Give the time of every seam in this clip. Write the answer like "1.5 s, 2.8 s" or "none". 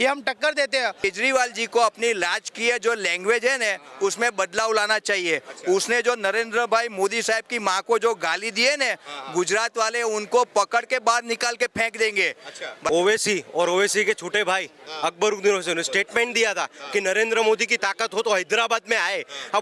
1.0 s, 12.9 s